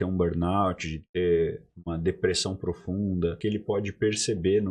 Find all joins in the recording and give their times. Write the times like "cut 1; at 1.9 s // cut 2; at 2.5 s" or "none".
cut 1; at 3.4 s